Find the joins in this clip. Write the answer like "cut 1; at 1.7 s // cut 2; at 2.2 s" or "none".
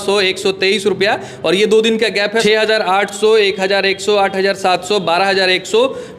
cut 1; at 2.4 s